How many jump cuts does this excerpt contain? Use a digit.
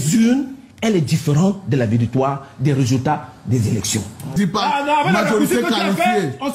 1